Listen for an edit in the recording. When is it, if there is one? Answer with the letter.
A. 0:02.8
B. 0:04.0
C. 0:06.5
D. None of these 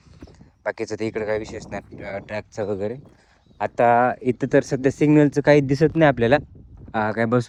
D